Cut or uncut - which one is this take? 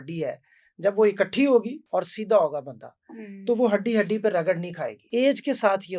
cut